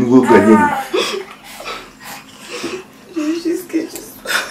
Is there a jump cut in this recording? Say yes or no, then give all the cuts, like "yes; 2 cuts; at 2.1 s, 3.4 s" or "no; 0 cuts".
no; 0 cuts